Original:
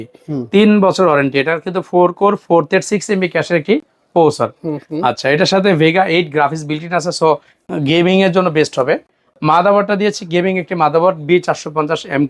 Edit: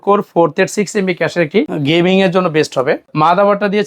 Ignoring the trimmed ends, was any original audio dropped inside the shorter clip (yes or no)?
yes